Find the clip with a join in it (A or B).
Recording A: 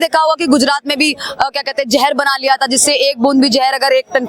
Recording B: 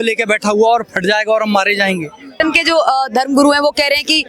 B